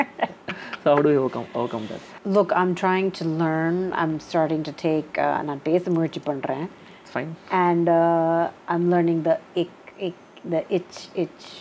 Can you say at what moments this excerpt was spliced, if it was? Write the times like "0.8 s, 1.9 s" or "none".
none